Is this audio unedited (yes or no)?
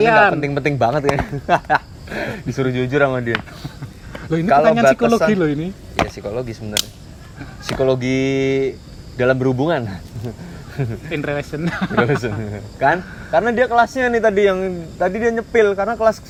yes